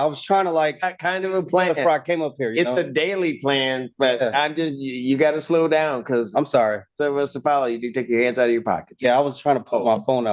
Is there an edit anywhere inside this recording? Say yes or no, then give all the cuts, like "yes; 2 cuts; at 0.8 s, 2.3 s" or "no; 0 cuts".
no; 0 cuts